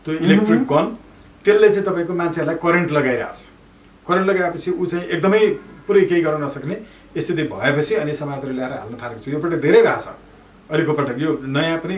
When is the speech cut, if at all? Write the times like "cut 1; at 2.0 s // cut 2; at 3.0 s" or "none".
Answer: none